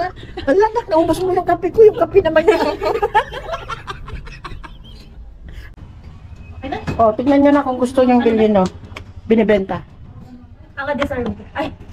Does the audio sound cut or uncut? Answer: cut